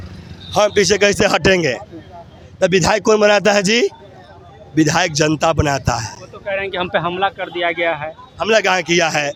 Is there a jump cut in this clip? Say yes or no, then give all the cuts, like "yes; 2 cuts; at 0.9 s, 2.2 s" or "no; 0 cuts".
no; 0 cuts